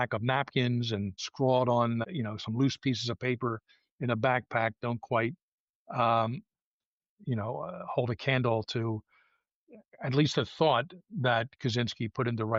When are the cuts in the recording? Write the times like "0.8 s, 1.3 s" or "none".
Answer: 1.2 s, 2.0 s